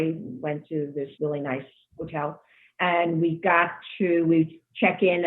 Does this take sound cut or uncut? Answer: cut